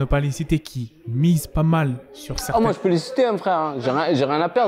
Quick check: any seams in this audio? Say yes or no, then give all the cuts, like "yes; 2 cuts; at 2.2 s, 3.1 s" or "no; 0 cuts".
no; 0 cuts